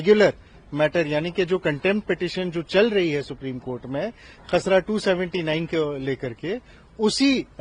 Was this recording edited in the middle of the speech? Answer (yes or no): no